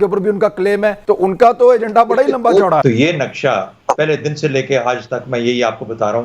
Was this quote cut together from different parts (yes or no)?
yes